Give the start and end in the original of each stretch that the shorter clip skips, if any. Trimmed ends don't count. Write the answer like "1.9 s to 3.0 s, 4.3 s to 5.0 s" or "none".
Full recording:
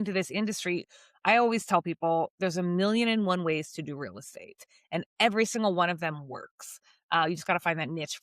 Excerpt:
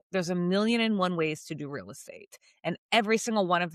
none